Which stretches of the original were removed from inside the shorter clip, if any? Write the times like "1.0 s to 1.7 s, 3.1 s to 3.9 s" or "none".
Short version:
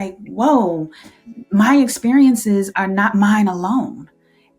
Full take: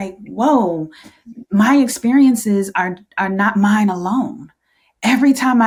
2.7 s to 3.1 s